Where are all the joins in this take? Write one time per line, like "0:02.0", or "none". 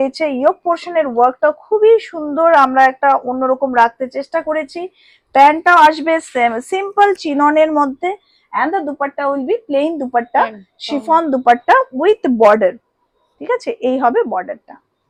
none

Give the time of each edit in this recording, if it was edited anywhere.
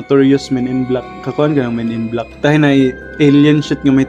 0:02.3
0:03.0

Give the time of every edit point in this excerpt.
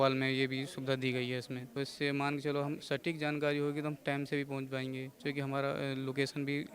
0:01.6
0:05.1

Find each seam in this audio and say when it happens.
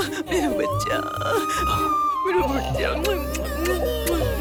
none

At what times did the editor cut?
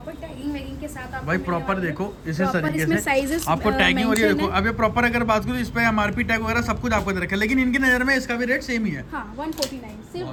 none

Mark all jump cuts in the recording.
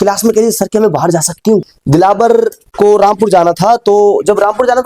0:01.8
0:02.6

